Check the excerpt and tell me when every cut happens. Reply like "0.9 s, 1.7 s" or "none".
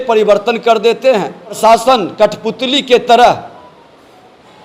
1.6 s